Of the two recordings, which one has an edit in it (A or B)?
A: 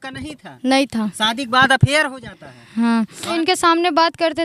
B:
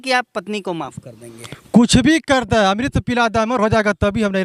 A